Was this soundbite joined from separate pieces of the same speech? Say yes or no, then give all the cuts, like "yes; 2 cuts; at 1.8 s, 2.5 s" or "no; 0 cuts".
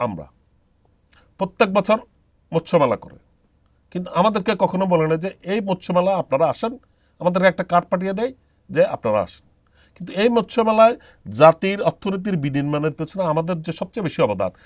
no; 0 cuts